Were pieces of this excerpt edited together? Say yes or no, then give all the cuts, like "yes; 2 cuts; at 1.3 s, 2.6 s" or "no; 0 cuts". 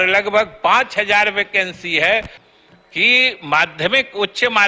yes; 1 cut; at 2.4 s